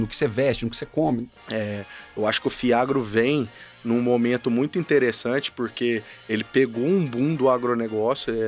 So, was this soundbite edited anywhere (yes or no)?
yes